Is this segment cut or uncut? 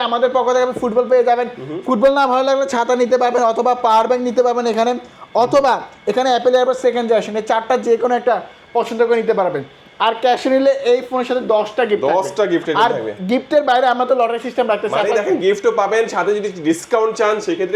uncut